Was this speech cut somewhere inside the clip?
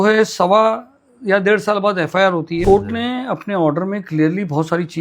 yes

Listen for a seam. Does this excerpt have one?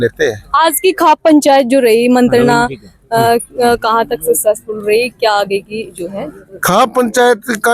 no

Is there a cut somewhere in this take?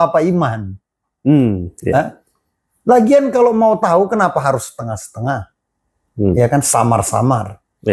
no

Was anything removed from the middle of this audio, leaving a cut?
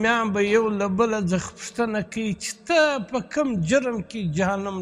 no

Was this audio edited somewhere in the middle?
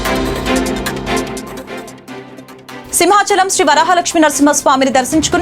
yes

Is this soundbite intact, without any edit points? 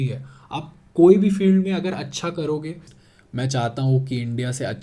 no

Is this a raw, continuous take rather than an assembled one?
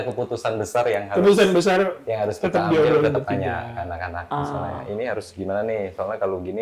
yes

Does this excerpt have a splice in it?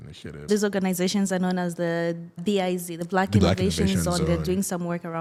no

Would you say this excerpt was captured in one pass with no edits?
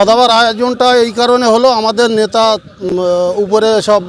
yes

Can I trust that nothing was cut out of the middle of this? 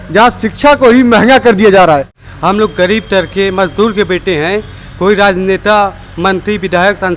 no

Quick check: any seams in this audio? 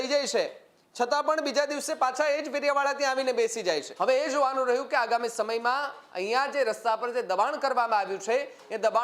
yes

